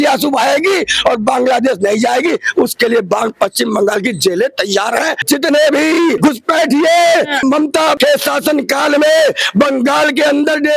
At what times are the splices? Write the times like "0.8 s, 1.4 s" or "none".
5.2 s, 6.2 s, 7.6 s

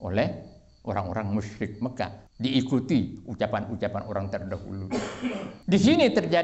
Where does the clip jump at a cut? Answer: 2.2 s, 5.5 s

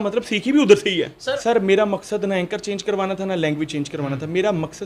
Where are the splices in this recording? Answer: 1.3 s

